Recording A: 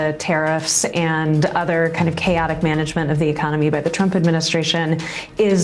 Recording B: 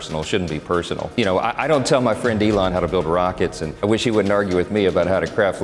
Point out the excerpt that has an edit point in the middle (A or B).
B